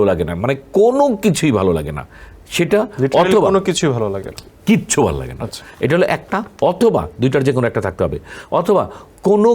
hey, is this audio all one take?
yes; 0 cuts

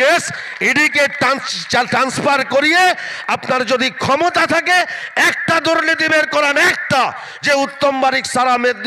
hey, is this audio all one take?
yes; 0 cuts

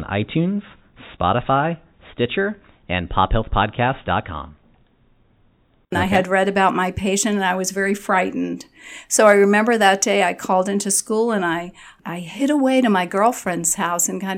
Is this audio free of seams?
no; 2 cuts; at 5.9 s, 11.9 s

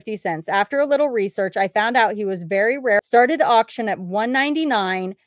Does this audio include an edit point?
yes; 1 cut; at 3.0 s

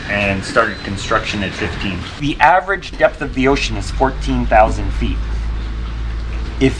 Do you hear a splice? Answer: yes; 1 cut; at 2.1 s

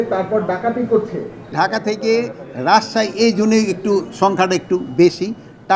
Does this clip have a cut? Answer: yes; 1 cut; at 1.5 s

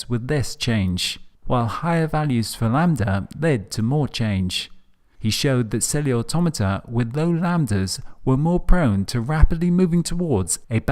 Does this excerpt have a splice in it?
no; 0 cuts

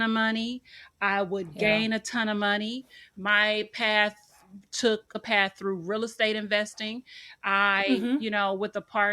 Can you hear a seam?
yes; 1 cut; at 5.2 s

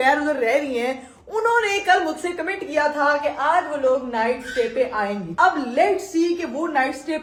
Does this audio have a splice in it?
no; 0 cuts

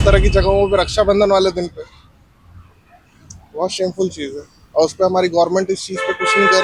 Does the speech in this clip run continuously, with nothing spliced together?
yes; 0 cuts

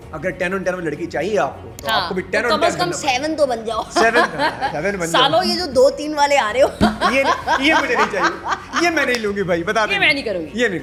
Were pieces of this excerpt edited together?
no; 0 cuts

